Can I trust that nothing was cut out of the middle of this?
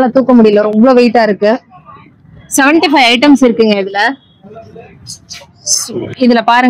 yes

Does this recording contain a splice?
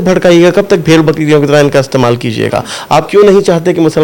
no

